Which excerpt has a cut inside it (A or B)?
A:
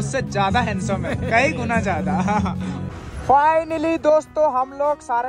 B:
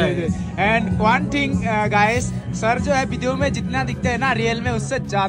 A